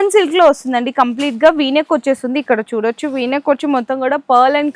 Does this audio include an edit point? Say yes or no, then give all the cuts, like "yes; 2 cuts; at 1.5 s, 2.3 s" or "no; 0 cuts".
no; 0 cuts